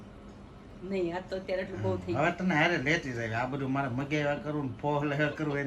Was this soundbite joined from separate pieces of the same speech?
no; 0 cuts

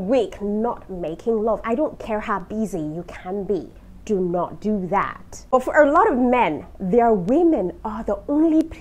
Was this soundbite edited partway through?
yes; 1 cut; at 5.5 s

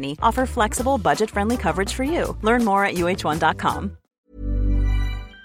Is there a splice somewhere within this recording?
yes; 1 cut; at 4.2 s

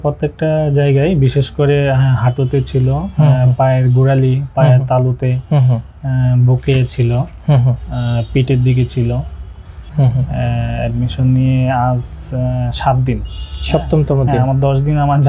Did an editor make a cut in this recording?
yes; 1 cut; at 9.8 s

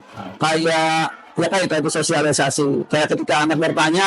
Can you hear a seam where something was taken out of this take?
no; 0 cuts

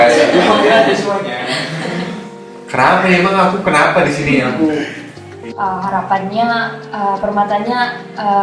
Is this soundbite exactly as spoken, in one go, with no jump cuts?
no; 1 cut; at 5.5 s

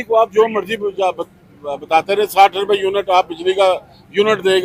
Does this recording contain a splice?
no; 0 cuts

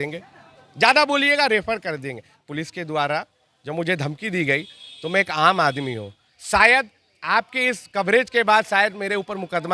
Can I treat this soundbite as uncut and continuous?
no; 1 cut; at 2.4 s

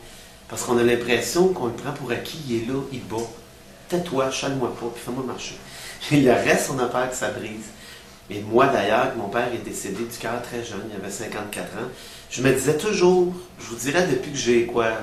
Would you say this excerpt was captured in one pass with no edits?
yes; 0 cuts

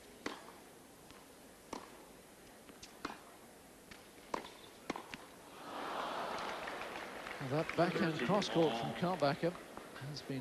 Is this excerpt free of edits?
no; 1 cut; at 4.2 s

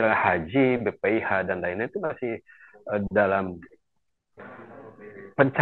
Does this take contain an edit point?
no; 0 cuts

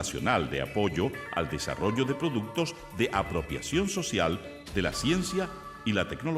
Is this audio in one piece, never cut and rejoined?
yes; 0 cuts

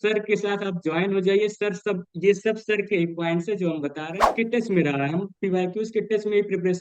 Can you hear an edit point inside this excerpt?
yes; 1 cut; at 4.3 s

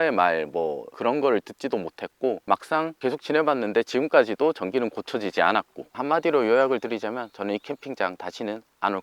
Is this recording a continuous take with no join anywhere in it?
no; 3 cuts; at 0.9 s, 2.8 s, 6.0 s

